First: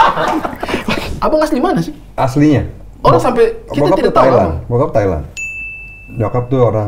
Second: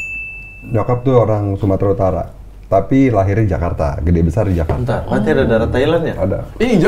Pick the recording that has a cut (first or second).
first